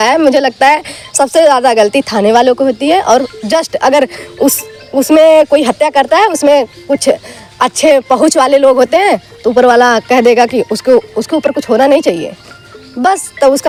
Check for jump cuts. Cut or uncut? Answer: uncut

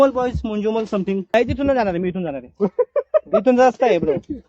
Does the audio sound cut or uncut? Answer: cut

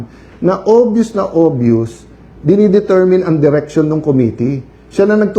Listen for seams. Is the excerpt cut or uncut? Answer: uncut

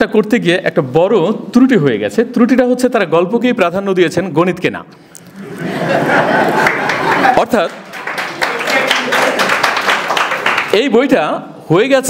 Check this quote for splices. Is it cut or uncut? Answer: uncut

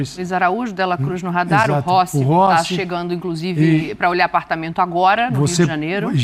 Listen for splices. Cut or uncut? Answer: uncut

